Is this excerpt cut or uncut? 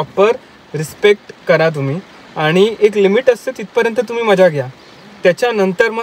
uncut